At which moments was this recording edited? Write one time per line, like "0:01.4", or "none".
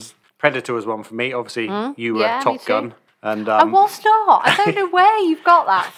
none